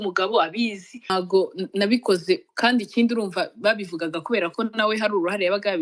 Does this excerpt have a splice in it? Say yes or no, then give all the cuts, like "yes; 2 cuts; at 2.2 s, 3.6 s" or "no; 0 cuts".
yes; 1 cut; at 1.1 s